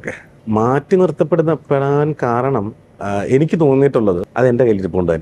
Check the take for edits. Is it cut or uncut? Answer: cut